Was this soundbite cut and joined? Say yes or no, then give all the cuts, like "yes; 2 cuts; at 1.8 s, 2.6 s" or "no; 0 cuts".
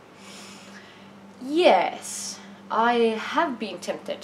no; 0 cuts